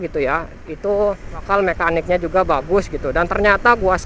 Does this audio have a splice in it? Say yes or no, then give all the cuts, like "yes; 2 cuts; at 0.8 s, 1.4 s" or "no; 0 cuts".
yes; 1 cut; at 1.4 s